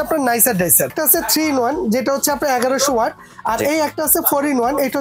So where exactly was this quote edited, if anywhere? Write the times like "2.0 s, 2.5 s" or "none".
0.9 s